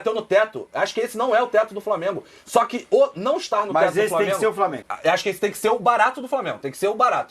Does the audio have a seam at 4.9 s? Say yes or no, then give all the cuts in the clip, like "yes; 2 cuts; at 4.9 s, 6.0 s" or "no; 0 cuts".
yes; 1 cut; at 4.9 s